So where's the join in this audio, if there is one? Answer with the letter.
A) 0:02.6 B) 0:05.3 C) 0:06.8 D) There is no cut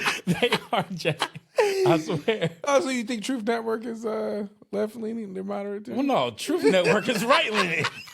A